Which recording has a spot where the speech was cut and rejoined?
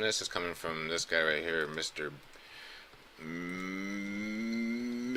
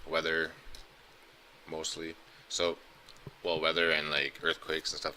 second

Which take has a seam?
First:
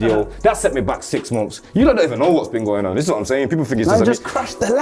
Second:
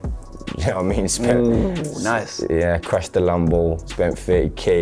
second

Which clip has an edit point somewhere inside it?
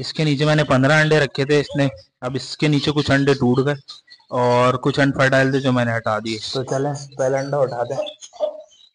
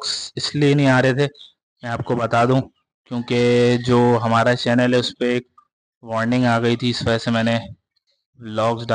first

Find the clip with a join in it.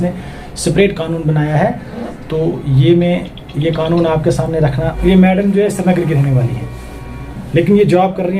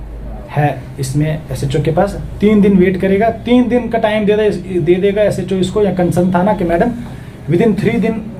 first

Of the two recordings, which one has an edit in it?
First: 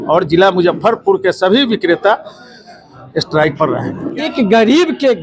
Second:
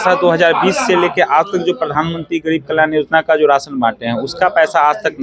first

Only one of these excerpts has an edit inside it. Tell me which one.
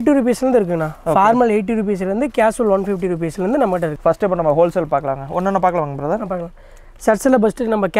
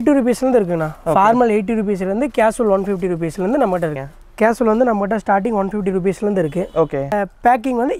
second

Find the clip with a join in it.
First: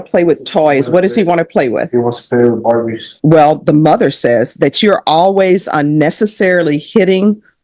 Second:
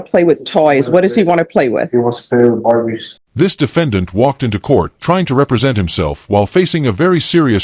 first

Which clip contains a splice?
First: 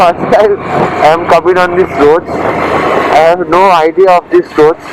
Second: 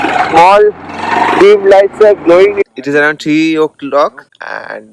second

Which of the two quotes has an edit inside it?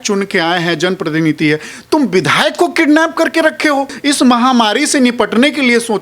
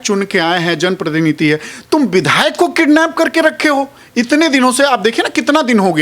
first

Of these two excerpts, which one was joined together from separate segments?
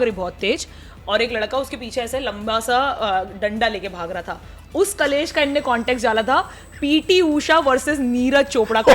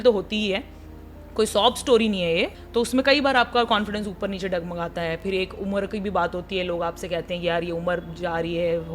second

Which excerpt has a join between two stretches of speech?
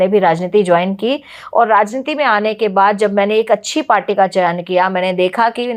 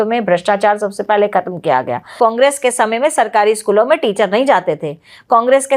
second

